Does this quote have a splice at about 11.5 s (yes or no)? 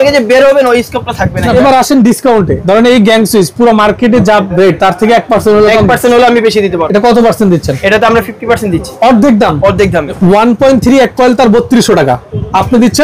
no